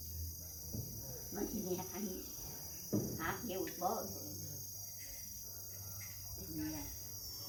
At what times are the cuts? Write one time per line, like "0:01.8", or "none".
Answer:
none